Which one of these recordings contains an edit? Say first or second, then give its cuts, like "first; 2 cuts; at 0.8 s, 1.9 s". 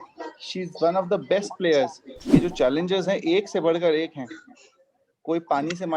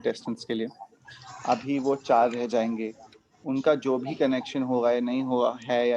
first; 1 cut; at 2.4 s